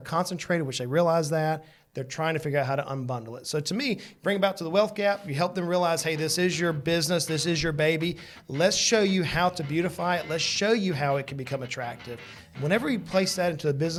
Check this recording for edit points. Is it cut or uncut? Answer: uncut